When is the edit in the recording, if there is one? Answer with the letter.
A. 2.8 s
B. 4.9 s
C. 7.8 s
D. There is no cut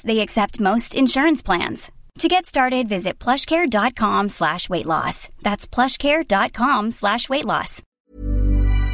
C